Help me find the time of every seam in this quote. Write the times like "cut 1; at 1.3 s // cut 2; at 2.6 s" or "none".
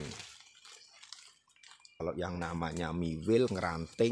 cut 1; at 2.0 s